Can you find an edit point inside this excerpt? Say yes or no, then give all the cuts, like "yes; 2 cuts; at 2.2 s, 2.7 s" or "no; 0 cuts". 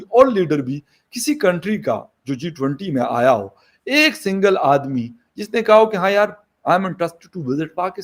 no; 0 cuts